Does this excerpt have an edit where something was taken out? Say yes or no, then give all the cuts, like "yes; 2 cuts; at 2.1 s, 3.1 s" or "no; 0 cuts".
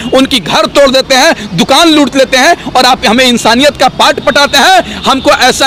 no; 0 cuts